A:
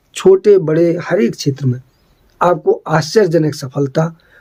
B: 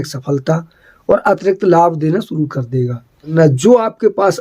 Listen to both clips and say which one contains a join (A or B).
B